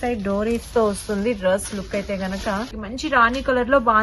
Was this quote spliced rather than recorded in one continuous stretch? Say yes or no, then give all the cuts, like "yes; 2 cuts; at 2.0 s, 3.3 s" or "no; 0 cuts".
yes; 1 cut; at 2.8 s